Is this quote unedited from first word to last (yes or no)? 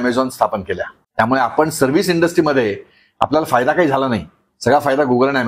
no